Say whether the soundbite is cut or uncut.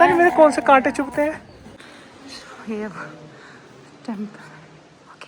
cut